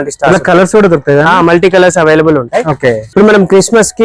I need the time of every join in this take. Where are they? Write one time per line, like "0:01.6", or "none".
0:03.0